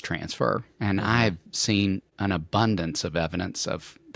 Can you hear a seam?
yes; 1 cut; at 2.1 s

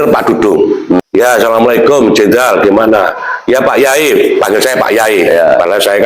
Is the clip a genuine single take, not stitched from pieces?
no; 1 cut; at 1.0 s

